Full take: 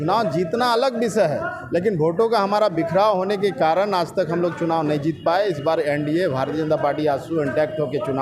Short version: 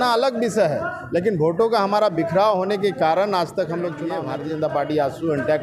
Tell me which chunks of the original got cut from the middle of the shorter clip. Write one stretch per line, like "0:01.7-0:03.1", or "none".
0:04.7-0:06.2